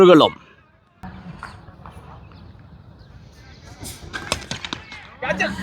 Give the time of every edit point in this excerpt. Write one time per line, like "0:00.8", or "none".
0:01.0